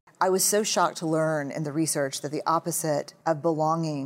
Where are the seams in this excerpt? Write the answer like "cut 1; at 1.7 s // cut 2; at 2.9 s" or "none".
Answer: cut 1; at 3.1 s